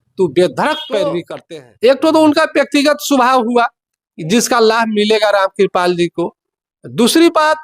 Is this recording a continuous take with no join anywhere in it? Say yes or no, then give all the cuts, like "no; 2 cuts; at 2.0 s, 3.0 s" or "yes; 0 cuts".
no; 1 cut; at 1.3 s